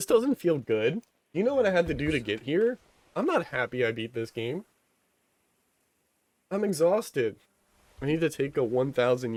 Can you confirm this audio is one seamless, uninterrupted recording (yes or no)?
yes